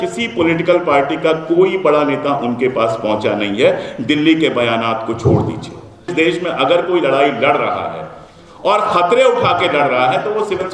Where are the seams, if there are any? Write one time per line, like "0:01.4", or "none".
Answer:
0:06.1